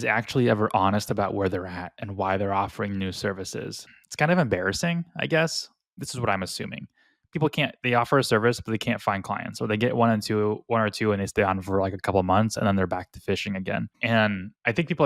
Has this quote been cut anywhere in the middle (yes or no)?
yes